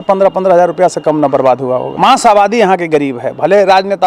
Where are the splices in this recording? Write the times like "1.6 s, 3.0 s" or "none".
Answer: 1.9 s